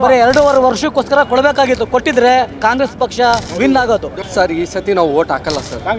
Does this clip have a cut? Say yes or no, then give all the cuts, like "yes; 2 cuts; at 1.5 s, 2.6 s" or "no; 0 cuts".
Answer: yes; 2 cuts; at 3.5 s, 4.2 s